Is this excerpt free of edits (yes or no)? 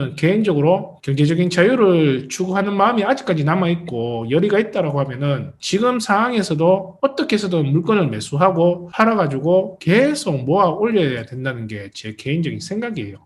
no